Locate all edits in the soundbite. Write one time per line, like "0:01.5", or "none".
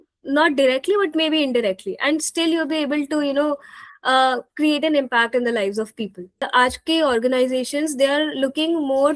0:06.4